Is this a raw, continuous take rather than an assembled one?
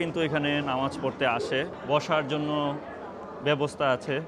no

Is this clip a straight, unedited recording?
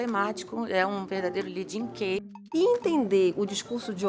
no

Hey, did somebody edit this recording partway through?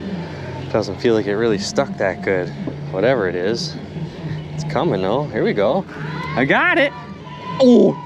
no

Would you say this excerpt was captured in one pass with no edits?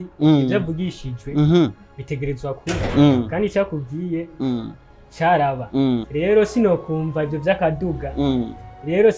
no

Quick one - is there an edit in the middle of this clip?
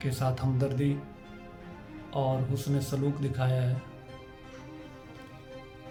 no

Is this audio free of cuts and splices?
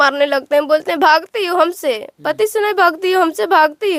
yes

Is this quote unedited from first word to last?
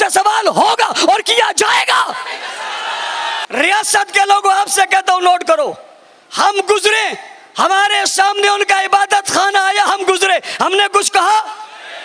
no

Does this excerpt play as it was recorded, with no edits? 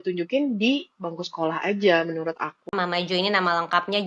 no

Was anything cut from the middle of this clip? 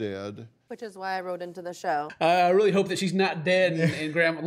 yes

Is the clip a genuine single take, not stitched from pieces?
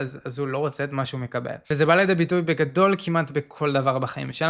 no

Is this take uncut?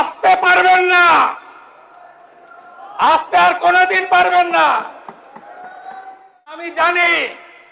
no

